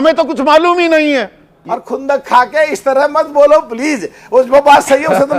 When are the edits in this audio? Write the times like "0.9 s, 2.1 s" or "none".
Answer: 1.6 s